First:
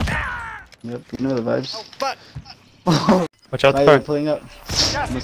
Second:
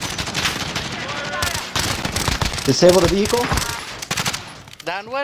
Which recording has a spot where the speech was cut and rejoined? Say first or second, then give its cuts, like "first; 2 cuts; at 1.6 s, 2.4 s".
first; 1 cut; at 3.4 s